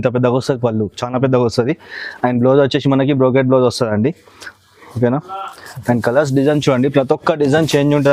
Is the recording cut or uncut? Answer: uncut